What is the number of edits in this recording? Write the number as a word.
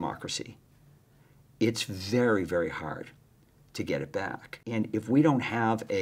one